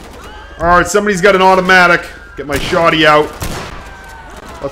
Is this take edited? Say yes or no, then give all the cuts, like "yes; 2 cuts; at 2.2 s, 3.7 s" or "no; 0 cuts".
no; 0 cuts